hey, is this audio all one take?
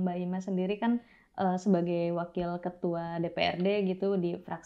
yes; 0 cuts

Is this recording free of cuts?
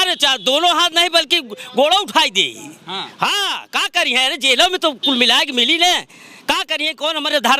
yes; 0 cuts

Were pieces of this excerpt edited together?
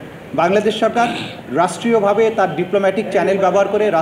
no; 0 cuts

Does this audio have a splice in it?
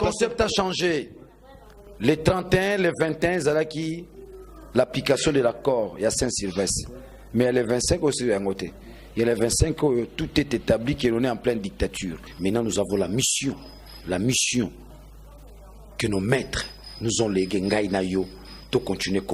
yes; 1 cut; at 12.3 s

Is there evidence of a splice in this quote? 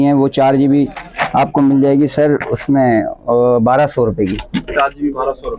no; 0 cuts

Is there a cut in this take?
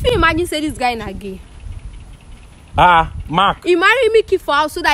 no; 0 cuts

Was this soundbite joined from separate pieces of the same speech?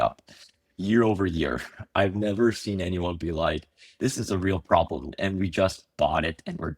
no; 0 cuts

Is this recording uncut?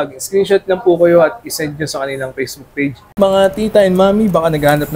no; 1 cut; at 3.0 s

